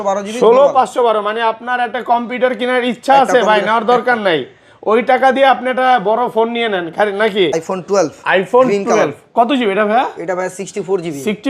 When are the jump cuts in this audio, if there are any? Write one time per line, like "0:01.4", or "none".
0:07.5